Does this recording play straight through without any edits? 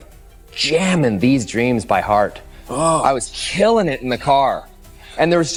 yes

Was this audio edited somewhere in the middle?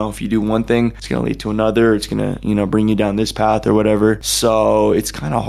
no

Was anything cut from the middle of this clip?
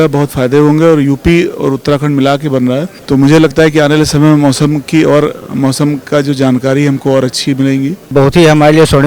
yes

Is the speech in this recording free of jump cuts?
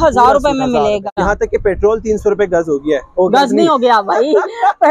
no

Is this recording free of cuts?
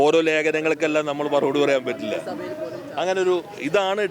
no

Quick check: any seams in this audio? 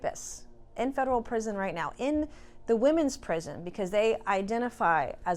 no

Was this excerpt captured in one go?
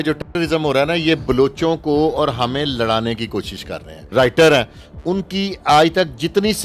no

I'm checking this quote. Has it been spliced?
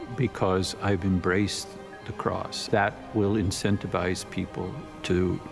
yes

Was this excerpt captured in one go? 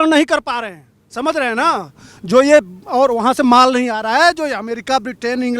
yes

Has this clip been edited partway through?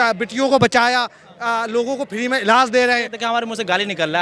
yes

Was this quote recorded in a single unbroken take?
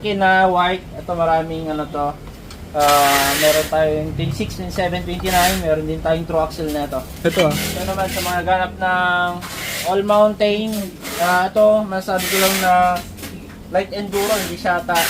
no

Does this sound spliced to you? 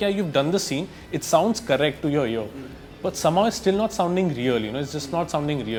no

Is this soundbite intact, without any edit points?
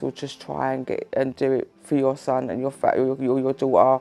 yes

